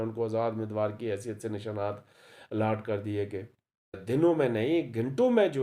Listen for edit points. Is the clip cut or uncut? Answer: cut